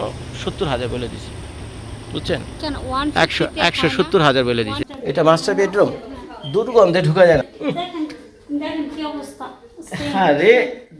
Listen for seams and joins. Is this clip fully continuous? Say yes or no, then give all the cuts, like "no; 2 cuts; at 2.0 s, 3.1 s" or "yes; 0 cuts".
no; 1 cut; at 4.8 s